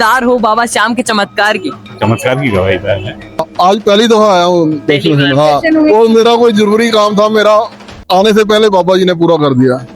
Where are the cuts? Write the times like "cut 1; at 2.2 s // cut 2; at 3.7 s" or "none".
cut 1; at 3.5 s